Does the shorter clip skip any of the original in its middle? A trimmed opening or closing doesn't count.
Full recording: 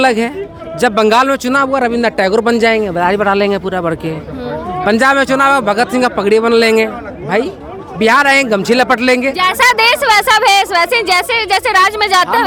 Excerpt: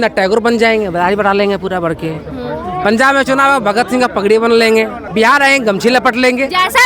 yes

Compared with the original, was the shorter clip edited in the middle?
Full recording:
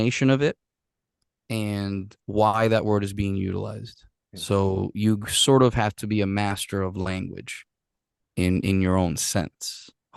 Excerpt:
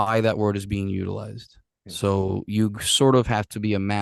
no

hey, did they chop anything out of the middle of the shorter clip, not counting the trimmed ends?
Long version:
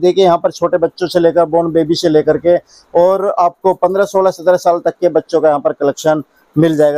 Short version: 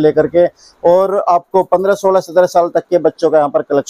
no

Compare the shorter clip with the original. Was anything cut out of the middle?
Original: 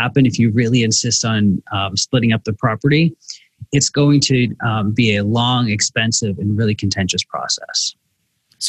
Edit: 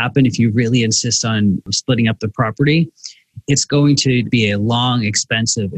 yes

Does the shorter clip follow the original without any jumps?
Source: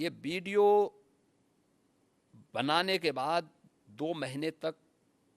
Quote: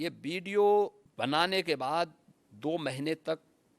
no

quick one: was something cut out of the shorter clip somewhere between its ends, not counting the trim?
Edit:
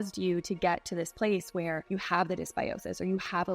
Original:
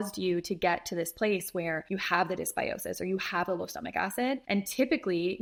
no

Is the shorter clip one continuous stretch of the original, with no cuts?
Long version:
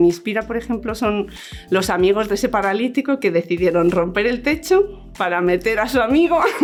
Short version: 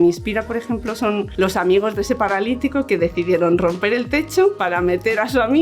no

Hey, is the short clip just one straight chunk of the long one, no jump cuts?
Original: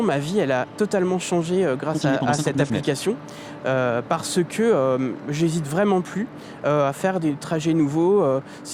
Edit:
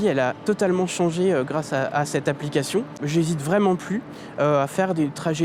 no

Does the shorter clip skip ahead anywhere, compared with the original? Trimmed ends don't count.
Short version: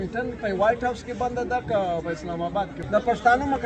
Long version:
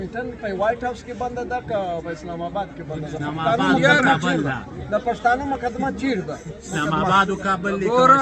yes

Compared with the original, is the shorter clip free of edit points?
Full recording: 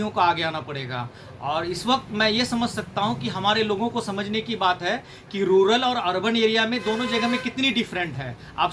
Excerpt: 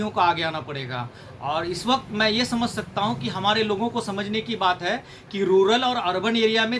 yes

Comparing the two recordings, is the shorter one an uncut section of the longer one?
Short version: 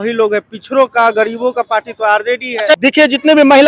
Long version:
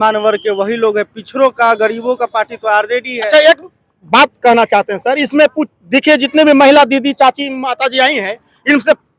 no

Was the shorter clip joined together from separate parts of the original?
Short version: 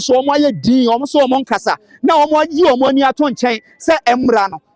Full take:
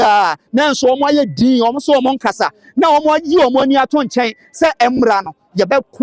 no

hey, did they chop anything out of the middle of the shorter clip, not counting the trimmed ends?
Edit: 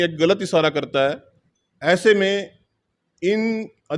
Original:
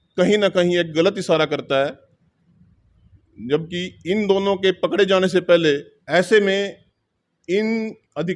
yes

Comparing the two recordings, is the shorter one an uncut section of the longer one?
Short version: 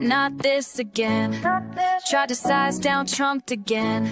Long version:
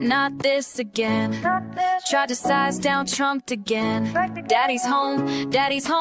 yes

